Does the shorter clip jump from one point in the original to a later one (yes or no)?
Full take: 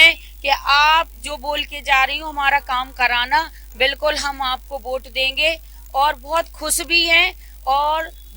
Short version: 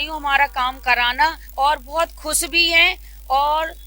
yes